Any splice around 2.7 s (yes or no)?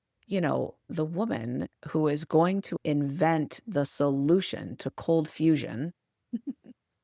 yes